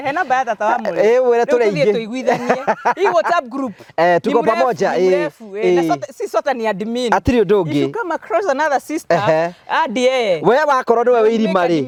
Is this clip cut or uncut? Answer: uncut